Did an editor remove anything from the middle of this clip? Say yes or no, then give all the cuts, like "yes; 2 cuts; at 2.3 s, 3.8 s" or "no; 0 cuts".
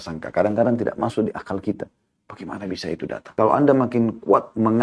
yes; 1 cut; at 3.3 s